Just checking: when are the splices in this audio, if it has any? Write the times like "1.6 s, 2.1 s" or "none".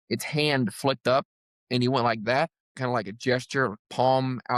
none